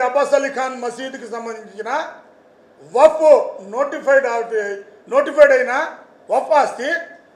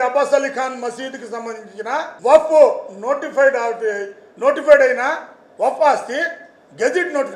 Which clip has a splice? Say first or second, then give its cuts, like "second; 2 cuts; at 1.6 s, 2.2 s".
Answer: second; 1 cut; at 2.1 s